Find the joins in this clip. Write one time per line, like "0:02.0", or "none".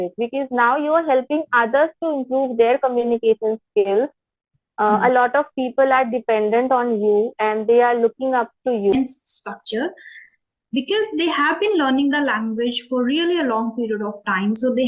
0:08.9